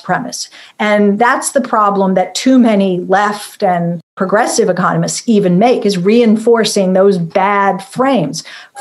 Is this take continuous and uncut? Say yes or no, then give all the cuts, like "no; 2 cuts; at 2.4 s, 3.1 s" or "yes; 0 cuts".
no; 1 cut; at 4.1 s